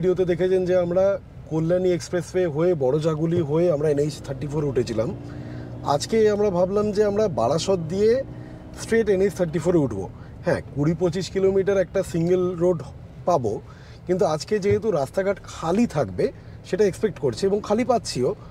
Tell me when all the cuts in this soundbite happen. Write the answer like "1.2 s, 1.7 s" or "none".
none